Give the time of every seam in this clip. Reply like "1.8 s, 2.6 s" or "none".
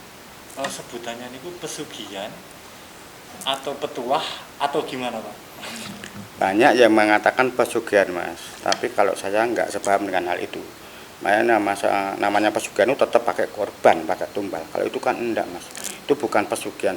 none